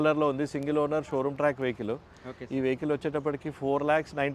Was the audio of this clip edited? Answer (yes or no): no